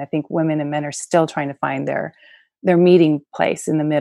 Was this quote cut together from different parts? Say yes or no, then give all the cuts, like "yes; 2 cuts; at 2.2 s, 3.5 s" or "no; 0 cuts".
no; 0 cuts